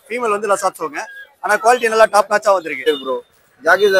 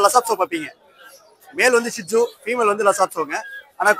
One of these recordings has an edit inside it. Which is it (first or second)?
first